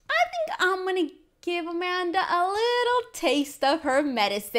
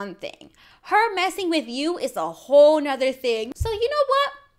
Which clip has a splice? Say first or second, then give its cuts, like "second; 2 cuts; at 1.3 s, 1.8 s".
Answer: second; 1 cut; at 3.5 s